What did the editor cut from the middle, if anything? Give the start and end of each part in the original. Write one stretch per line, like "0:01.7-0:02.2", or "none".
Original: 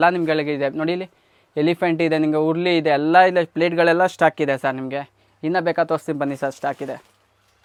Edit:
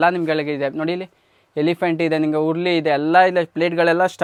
none